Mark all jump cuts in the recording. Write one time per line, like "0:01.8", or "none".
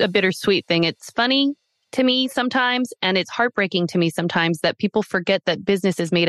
none

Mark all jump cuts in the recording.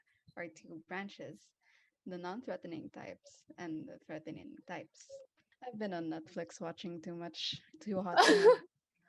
0:05.5

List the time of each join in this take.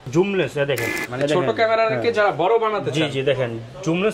0:01.0

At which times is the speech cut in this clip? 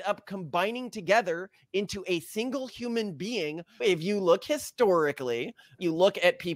0:03.8

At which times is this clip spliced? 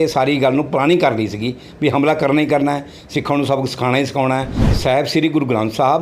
0:04.6

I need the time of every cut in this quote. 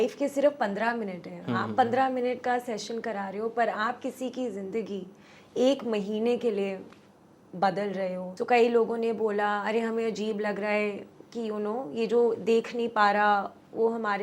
0:08.3

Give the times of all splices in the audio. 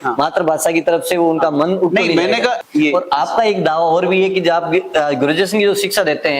0:02.6

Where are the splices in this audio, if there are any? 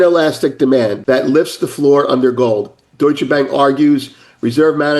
0:01.0

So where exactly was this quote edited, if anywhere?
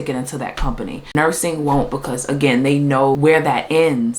0:01.1
0:03.2

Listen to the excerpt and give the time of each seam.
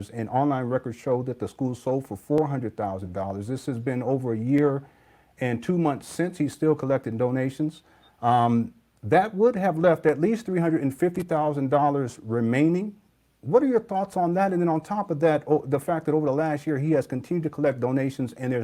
none

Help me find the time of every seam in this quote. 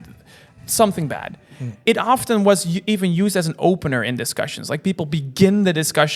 0:01.8

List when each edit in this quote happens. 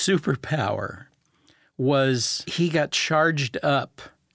none

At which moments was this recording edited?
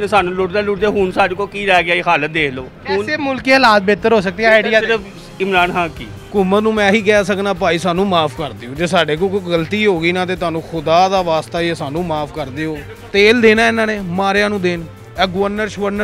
0:02.7
0:06.2
0:12.9

